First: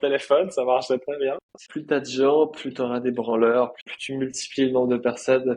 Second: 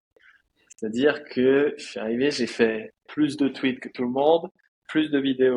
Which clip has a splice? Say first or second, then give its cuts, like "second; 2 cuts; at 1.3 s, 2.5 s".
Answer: first; 2 cuts; at 1.6 s, 3.9 s